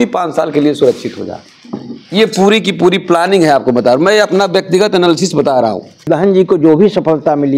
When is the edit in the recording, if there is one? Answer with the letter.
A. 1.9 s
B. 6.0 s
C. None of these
B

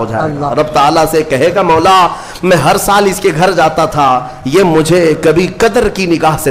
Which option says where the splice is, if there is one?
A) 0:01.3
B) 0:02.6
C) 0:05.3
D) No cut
D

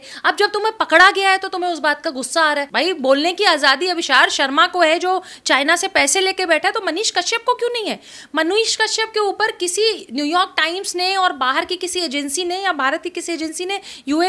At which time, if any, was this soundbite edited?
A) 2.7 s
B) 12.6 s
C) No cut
A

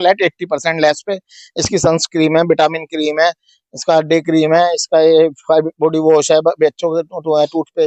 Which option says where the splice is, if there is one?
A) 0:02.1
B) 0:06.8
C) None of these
C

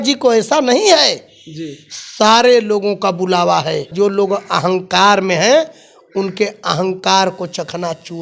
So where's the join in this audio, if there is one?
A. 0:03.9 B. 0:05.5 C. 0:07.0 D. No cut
A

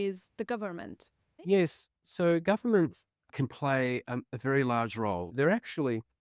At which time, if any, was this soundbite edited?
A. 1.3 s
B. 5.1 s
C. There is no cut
A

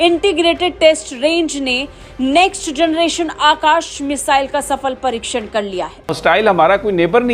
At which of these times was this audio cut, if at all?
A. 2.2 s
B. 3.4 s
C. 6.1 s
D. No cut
C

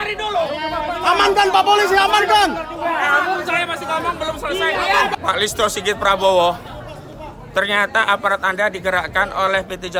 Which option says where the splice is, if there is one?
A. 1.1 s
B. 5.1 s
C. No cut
B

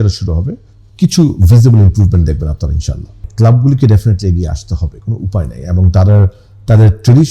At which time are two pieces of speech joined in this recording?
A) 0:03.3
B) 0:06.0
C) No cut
A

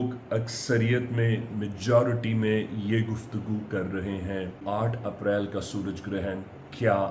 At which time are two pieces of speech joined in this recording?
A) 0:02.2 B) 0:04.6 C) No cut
B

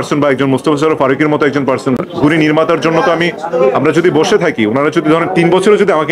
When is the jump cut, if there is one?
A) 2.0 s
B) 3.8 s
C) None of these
A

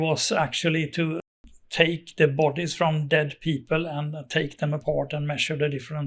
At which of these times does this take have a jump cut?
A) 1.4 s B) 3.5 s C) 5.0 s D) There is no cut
D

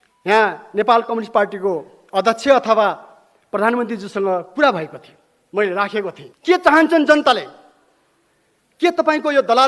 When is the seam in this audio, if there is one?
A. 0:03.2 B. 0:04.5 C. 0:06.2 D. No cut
C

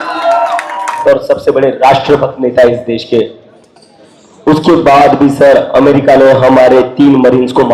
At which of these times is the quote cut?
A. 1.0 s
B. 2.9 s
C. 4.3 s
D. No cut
A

